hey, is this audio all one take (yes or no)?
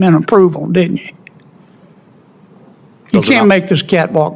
yes